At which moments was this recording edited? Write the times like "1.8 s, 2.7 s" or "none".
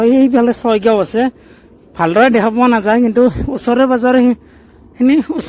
none